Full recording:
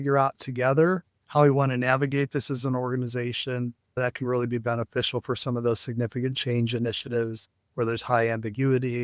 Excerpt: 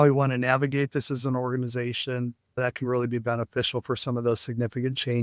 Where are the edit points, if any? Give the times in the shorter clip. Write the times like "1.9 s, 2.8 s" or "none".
none